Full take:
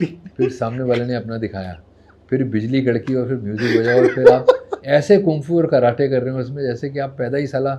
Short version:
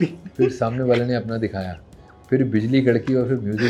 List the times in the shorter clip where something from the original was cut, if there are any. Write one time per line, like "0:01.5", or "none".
none